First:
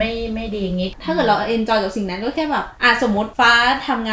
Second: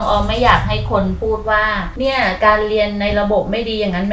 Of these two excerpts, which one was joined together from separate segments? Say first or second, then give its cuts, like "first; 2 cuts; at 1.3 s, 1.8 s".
first; 1 cut; at 0.9 s